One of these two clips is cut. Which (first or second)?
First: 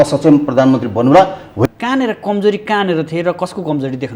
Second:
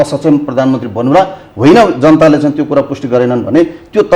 first